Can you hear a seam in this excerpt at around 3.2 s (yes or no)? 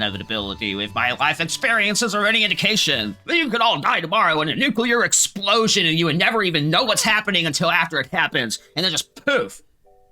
yes